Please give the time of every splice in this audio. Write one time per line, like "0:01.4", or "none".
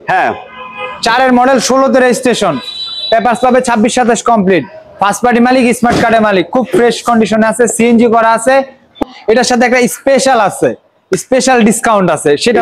0:09.0

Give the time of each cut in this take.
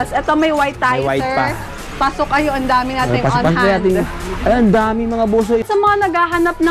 0:05.6

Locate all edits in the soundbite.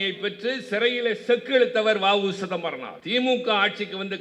0:02.9

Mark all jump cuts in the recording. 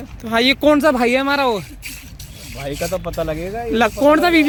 none

